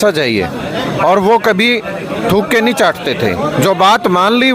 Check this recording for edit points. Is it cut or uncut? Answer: uncut